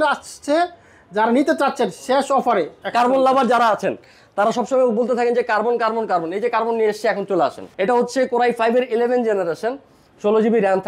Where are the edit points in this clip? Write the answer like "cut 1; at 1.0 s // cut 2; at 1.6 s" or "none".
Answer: cut 1; at 2.8 s // cut 2; at 7.6 s